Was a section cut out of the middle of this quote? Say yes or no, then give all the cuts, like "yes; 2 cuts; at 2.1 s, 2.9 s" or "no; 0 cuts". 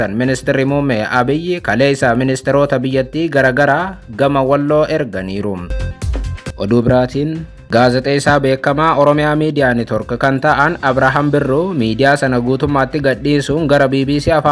yes; 2 cuts; at 6.1 s, 7.5 s